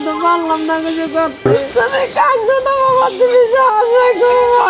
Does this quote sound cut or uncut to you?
cut